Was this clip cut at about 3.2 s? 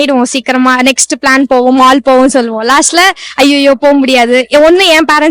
no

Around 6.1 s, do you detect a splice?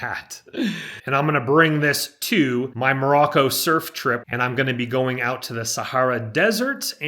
no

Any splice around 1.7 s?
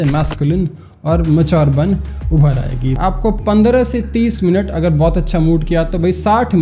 no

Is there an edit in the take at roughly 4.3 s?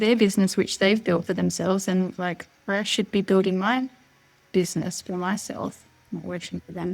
no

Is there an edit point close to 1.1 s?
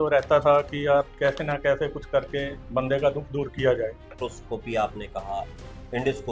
yes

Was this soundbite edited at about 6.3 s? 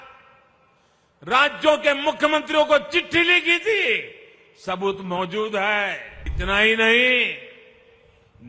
yes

